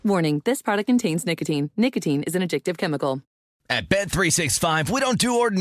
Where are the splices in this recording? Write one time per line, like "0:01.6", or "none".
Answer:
0:03.4

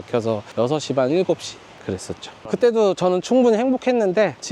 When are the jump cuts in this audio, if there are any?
0:02.5

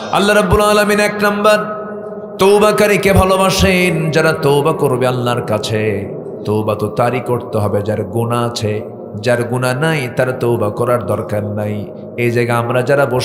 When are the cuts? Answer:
none

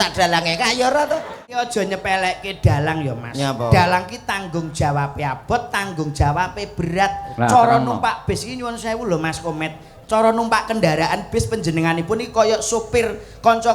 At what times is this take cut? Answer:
0:01.6

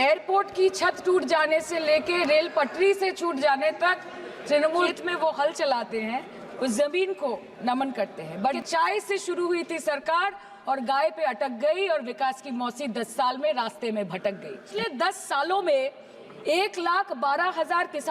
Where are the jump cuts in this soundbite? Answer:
0:04.9
0:08.6
0:14.6

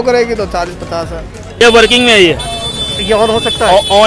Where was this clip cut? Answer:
0:01.6

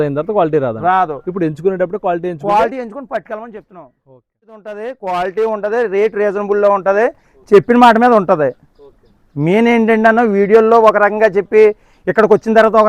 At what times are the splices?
0:04.8

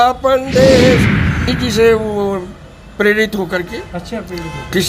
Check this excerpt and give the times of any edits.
0:01.5

